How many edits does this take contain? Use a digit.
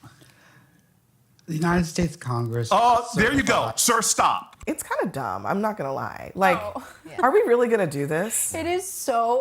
1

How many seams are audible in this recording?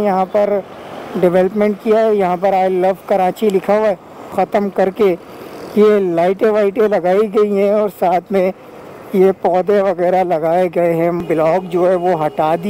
2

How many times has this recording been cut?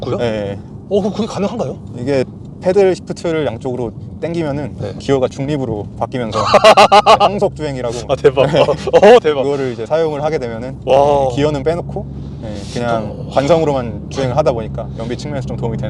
0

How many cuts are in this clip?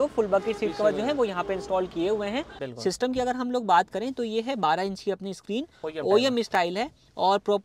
1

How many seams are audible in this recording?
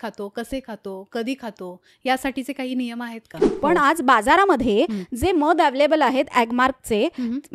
1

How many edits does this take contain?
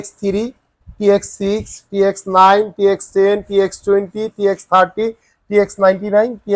0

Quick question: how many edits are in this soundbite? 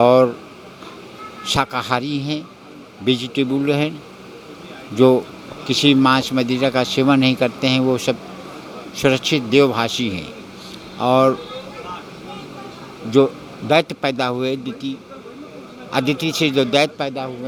0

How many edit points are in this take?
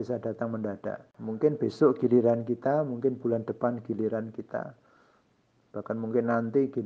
1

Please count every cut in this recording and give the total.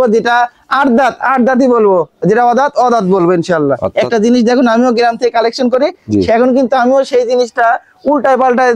1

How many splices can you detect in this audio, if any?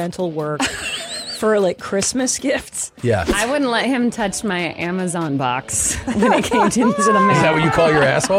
1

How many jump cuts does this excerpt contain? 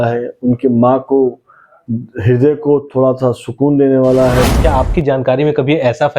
1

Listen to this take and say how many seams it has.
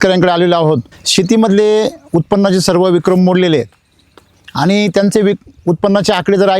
1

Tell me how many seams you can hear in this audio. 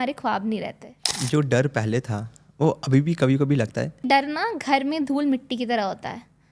2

